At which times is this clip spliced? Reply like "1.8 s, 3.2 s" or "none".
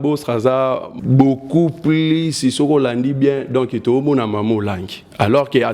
0.9 s